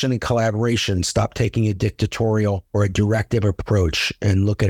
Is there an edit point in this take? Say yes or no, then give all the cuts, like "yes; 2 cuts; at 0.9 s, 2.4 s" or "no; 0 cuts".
no; 0 cuts